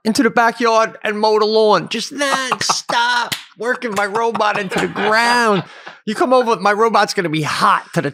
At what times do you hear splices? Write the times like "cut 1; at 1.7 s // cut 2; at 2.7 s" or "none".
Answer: none

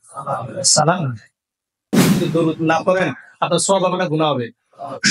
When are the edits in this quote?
cut 1; at 2.2 s

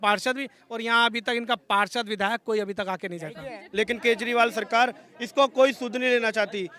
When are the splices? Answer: cut 1; at 3.6 s

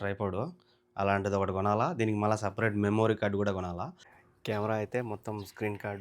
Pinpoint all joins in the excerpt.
cut 1; at 4.1 s

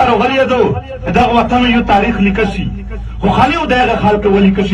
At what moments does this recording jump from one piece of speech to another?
cut 1; at 0.9 s

